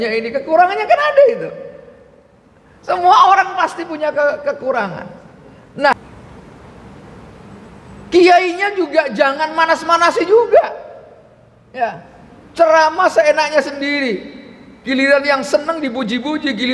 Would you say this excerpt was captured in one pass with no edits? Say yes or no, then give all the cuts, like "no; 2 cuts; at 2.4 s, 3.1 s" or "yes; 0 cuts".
no; 1 cut; at 5.9 s